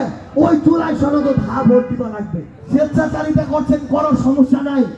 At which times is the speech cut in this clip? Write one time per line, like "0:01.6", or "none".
0:02.5